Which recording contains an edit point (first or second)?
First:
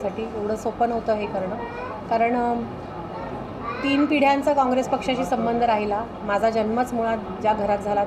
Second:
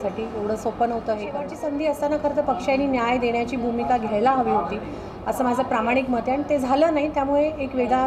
second